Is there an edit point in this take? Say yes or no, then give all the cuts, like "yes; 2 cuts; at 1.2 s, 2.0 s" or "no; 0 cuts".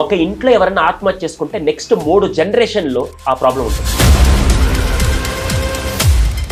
no; 0 cuts